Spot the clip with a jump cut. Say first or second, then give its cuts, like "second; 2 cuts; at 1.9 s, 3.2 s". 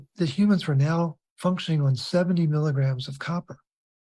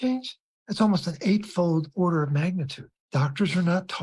second; 1 cut; at 2.9 s